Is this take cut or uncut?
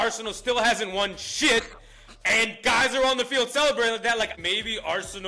cut